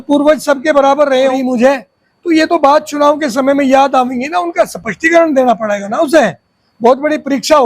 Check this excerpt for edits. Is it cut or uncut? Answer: cut